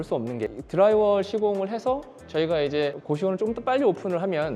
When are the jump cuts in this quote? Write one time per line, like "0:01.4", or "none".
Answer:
none